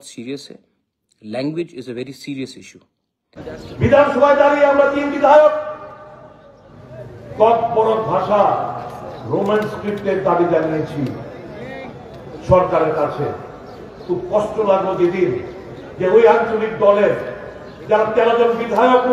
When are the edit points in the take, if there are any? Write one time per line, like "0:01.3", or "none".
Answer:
0:03.5